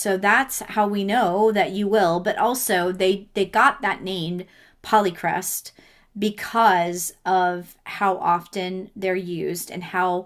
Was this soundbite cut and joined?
no; 0 cuts

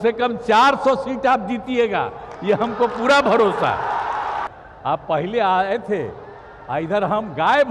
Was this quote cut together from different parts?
yes; 1 cut; at 4.5 s

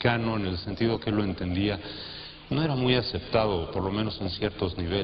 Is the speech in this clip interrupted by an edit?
yes; 1 cut; at 3.5 s

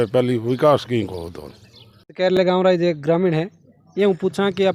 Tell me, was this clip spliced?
no; 0 cuts

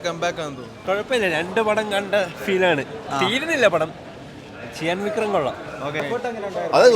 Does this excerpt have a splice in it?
yes; 2 cuts; at 0.8 s, 6.0 s

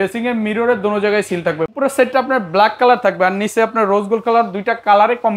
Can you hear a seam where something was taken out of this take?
yes; 1 cut; at 1.7 s

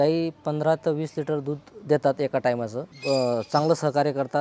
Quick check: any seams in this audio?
yes; 1 cut; at 2.9 s

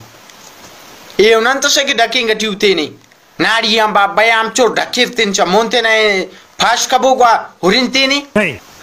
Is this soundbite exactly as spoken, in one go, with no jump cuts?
yes; 0 cuts

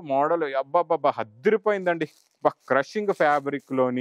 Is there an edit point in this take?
no; 0 cuts

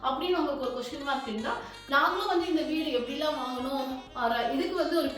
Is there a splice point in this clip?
yes; 1 cut; at 1.7 s

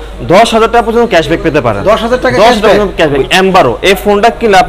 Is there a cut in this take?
yes; 1 cut; at 3.2 s

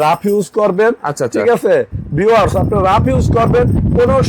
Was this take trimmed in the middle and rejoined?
no; 0 cuts

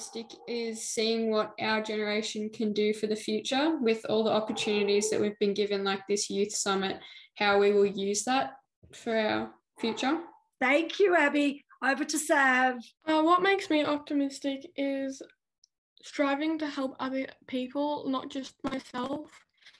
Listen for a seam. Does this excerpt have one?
yes; 2 cuts; at 10.4 s, 12.9 s

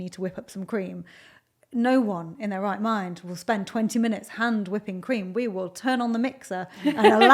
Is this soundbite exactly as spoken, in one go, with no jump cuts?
yes; 0 cuts

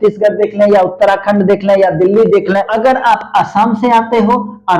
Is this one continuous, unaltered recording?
no; 1 cut; at 2.7 s

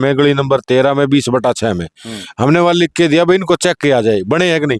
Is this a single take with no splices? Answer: yes; 0 cuts

